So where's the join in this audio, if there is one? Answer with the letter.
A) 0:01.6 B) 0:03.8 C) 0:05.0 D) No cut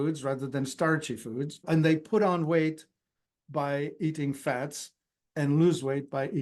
A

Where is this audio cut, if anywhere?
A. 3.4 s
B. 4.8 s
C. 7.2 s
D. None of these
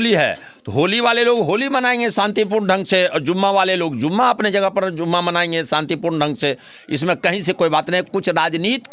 D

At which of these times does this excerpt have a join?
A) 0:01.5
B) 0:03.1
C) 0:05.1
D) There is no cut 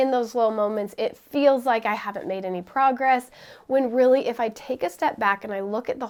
D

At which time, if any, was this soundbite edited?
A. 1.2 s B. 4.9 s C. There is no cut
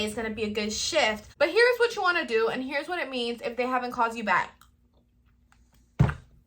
A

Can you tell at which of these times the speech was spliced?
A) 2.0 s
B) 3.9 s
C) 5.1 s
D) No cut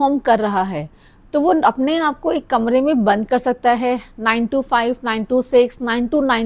D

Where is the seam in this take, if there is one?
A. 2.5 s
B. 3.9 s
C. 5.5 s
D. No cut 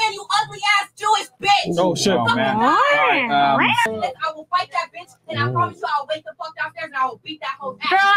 B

